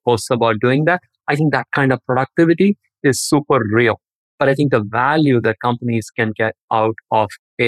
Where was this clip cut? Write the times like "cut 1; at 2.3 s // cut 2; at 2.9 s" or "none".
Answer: cut 1; at 4.2 s